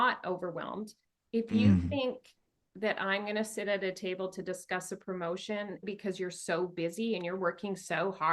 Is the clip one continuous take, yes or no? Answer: no